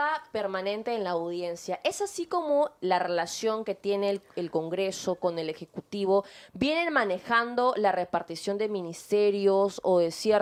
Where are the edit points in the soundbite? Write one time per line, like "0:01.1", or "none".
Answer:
none